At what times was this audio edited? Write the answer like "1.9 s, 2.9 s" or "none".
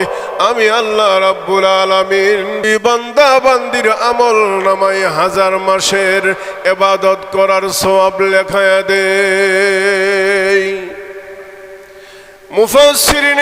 2.7 s